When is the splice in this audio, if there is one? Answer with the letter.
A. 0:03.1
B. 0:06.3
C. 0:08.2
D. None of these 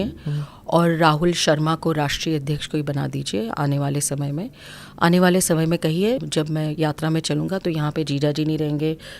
B